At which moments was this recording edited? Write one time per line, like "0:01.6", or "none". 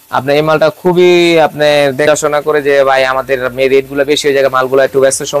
0:02.0